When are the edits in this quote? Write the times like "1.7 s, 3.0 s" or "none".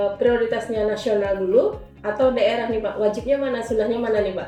none